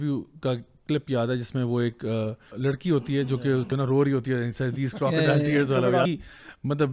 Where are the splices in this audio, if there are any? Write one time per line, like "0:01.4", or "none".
0:02.5
0:03.7
0:06.1